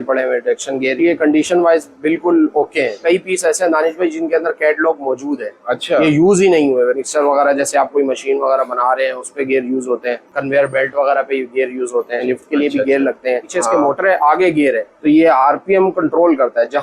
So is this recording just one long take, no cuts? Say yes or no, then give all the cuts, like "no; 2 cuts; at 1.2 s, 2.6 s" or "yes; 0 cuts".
no; 7 cuts; at 1.0 s, 3.0 s, 7.0 s, 10.2 s, 12.2 s, 13.5 s, 14.9 s